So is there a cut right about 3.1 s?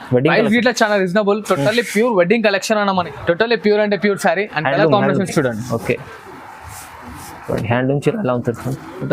yes; 1 cut; at 3.1 s

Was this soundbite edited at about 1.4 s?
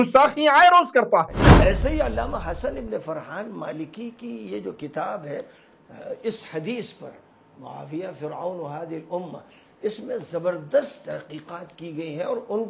yes; 1 cut; at 1.4 s

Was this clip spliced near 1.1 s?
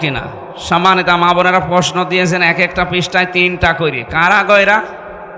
no; 0 cuts

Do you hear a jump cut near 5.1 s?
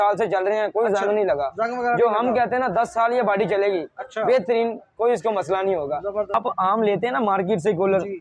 no; 1 cut; at 6.3 s

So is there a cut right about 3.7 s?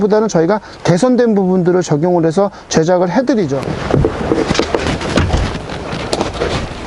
yes; 1 cut; at 3.7 s

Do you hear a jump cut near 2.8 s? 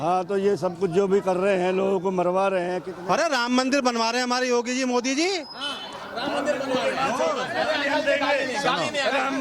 yes; 1 cut; at 2.8 s

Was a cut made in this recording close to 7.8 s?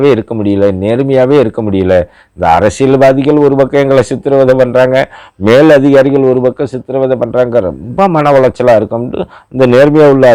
no; 0 cuts

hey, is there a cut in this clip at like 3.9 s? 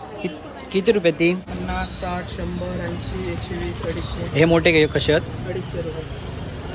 no; 1 cut; at 1.5 s

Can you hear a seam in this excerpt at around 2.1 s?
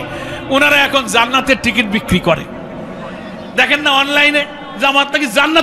no; 1 cut; at 4.6 s

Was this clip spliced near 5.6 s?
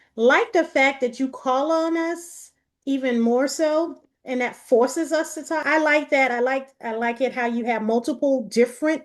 yes; 1 cut; at 5.6 s

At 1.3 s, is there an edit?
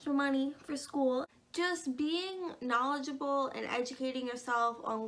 yes; 1 cut; at 1.3 s

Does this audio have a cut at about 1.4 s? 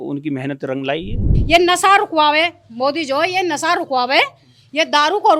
yes; 1 cut; at 1.4 s

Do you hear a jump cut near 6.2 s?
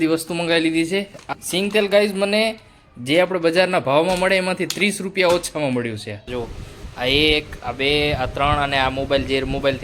yes; 2 cuts; at 1.2 s, 6.2 s

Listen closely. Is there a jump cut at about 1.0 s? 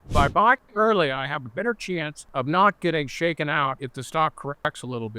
no; 2 cuts; at 2.2 s, 3.9 s

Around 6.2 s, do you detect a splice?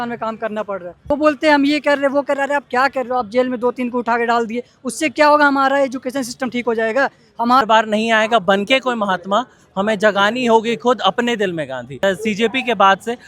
no; 3 cuts; at 0.9 s, 7.6 s, 12.0 s

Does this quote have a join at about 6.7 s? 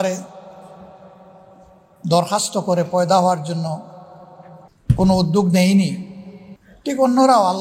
no; 1 cut; at 4.7 s

